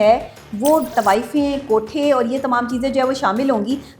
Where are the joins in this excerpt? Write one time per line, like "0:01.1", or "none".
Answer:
0:00.9